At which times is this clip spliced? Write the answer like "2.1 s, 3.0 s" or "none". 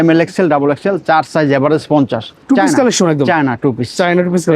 2.3 s